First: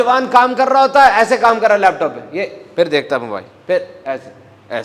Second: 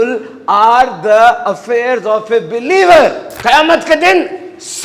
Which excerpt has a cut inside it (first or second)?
second